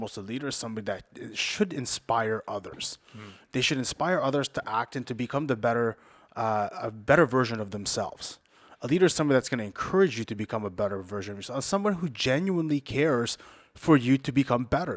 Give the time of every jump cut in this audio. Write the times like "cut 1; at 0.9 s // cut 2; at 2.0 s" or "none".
cut 1; at 1.1 s